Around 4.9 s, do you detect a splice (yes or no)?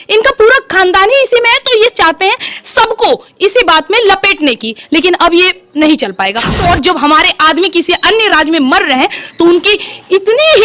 no